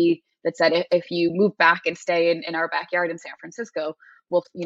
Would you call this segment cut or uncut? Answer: uncut